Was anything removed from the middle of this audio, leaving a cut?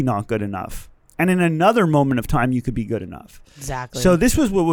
no; 0 cuts

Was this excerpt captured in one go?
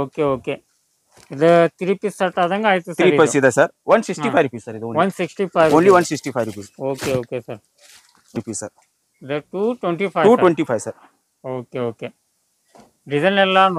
yes; 0 cuts

